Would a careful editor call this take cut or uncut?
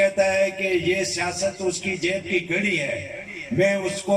uncut